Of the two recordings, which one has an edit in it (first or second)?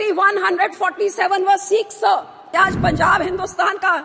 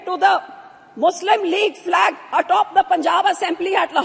first